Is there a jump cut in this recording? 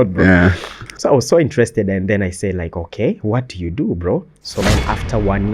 yes; 1 cut; at 4.6 s

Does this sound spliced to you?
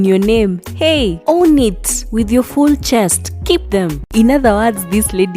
yes; 1 cut; at 4.0 s

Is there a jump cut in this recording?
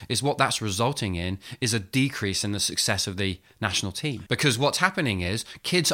yes; 1 cut; at 4.1 s

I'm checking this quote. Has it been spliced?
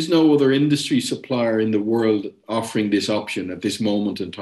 no; 0 cuts

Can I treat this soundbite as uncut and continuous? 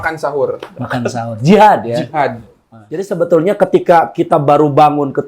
no; 1 cut; at 3.1 s

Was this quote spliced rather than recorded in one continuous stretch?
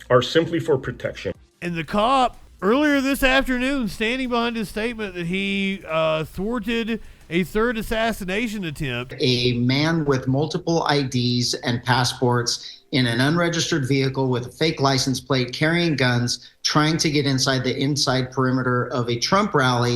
yes; 3 cuts; at 1.4 s, 2.5 s, 9.1 s

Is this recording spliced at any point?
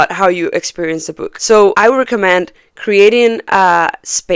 no; 0 cuts

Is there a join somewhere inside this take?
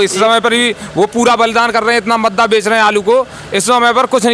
no; 0 cuts

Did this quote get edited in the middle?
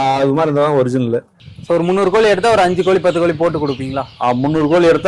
yes; 1 cut; at 1.4 s

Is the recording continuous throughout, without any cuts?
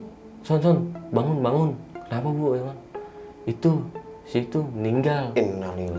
yes; 0 cuts

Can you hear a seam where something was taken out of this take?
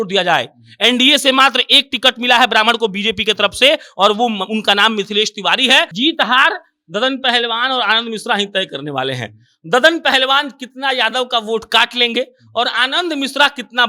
yes; 1 cut; at 5.9 s

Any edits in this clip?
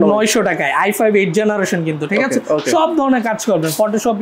no; 0 cuts

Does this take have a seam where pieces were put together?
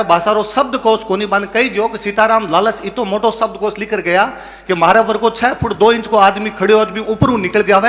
no; 0 cuts

